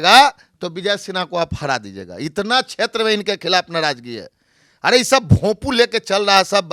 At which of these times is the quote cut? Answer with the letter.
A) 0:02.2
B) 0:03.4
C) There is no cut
C